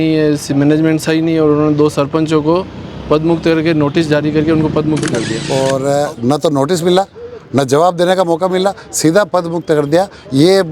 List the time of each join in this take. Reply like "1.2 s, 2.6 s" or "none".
5.4 s